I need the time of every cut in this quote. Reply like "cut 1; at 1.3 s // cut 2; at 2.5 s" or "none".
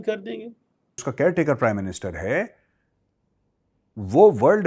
cut 1; at 1.0 s